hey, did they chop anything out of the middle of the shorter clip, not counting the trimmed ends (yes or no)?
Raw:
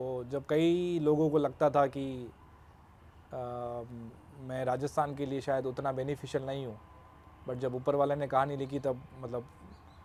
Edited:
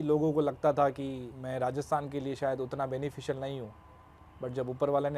yes